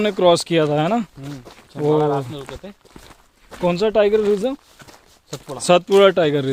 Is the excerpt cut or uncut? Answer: uncut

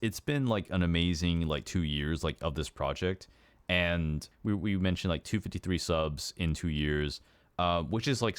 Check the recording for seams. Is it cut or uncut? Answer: cut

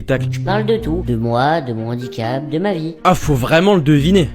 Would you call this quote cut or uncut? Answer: cut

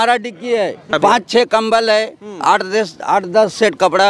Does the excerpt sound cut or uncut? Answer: cut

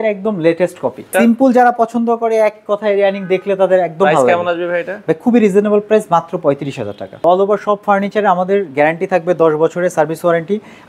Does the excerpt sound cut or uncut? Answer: cut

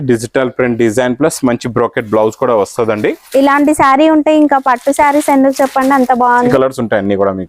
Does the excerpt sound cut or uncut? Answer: cut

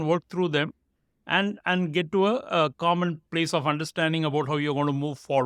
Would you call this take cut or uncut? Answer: uncut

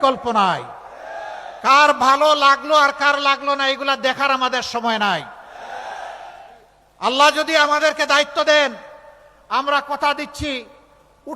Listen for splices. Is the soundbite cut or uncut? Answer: cut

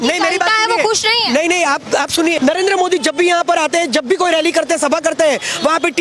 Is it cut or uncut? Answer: cut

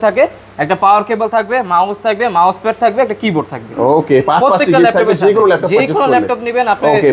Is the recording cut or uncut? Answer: uncut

